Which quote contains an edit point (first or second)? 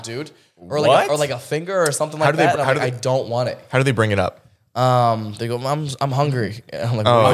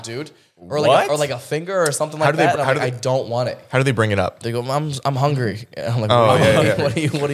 second